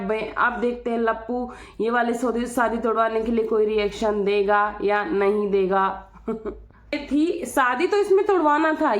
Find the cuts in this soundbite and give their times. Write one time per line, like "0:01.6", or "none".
0:07.0